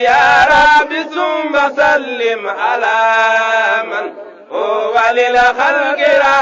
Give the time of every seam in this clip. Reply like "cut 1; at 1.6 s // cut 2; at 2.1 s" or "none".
cut 1; at 3.8 s